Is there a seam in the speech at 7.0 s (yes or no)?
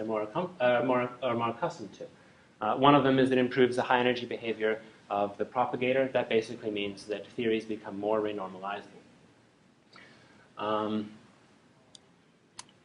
yes